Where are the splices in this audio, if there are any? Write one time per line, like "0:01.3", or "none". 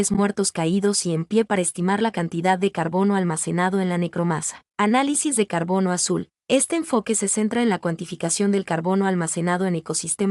0:04.6

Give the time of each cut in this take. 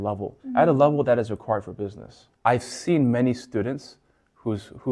0:02.2

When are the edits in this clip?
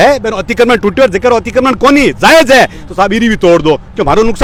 none

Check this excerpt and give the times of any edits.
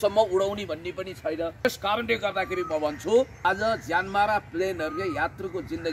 0:01.6
0:03.3

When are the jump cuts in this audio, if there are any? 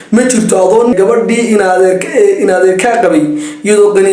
0:00.9

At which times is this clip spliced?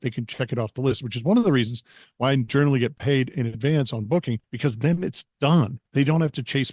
0:04.4
0:05.8

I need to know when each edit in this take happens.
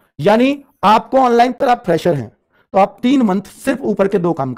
0:01.6

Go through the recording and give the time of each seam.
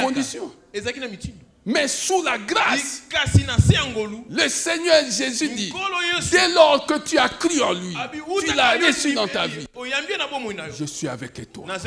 none

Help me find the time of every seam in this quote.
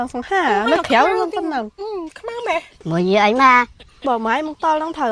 0:02.7

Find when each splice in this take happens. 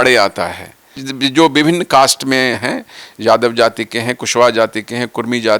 0:01.0

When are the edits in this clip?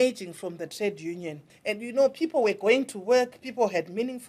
0:01.4

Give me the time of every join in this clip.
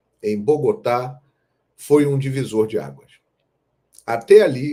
none

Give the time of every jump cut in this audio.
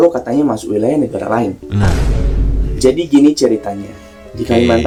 none

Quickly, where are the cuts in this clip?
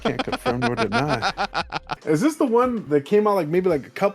0:01.8
0:02.8

